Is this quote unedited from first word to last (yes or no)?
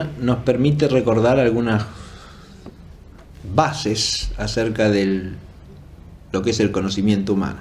no